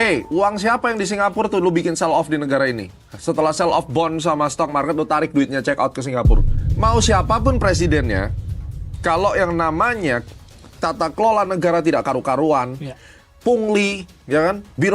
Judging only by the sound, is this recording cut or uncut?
cut